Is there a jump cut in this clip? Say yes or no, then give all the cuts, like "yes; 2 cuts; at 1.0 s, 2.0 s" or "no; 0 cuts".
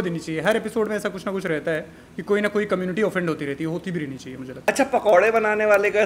yes; 1 cut; at 4.6 s